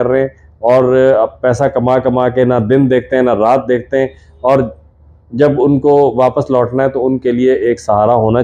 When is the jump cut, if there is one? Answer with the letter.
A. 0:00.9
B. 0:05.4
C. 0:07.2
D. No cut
D